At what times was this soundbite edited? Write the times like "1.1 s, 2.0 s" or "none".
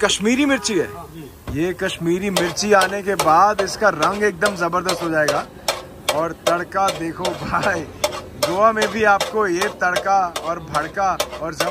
none